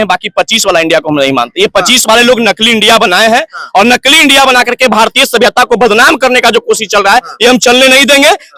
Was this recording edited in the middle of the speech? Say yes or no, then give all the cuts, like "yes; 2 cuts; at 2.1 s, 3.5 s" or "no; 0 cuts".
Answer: no; 0 cuts